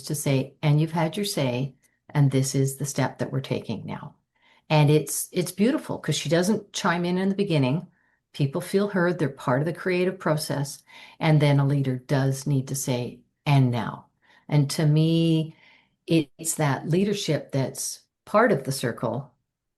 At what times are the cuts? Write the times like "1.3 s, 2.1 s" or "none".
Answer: none